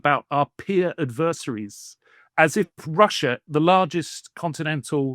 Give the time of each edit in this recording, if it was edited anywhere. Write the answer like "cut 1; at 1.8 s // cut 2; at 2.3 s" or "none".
cut 1; at 3.4 s